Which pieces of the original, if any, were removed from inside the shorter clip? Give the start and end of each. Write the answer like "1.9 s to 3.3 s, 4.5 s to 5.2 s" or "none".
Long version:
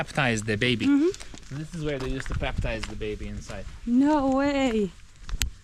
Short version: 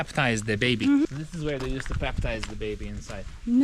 1.0 s to 1.5 s